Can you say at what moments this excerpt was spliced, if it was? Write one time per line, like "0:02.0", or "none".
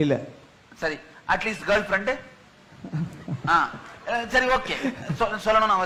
none